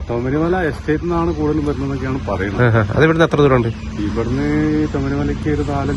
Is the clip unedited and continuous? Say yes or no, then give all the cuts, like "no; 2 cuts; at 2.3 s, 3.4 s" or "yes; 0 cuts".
yes; 0 cuts